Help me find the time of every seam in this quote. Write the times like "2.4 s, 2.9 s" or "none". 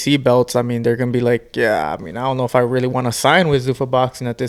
none

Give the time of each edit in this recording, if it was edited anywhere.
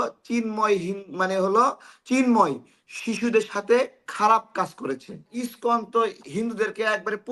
5.4 s

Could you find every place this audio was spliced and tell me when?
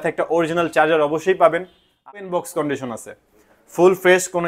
1.9 s

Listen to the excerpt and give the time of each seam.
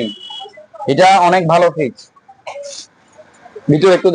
none

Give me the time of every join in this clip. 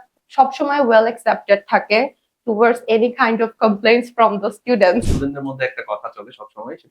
5.2 s

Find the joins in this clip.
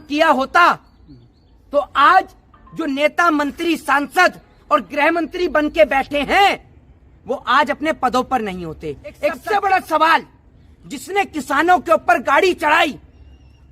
9.4 s

